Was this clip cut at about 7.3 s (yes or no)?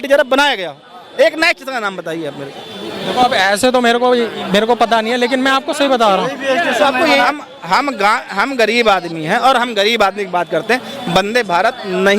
yes